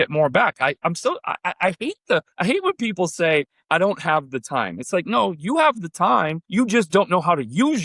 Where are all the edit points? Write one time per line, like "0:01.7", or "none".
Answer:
0:02.3
0:06.4